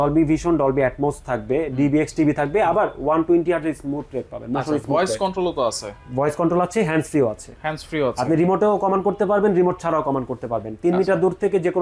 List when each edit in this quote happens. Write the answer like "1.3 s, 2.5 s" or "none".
none